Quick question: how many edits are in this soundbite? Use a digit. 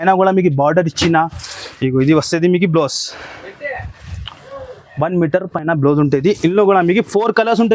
0